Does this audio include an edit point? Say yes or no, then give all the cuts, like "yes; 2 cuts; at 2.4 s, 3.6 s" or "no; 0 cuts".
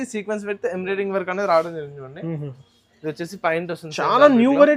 no; 0 cuts